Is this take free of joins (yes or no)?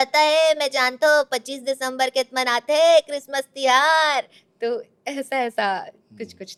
yes